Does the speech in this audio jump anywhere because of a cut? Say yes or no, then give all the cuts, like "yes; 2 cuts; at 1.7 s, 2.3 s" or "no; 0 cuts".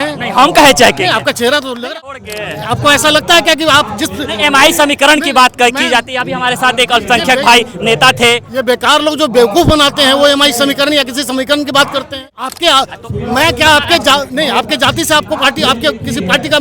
yes; 2 cuts; at 1.9 s, 12.1 s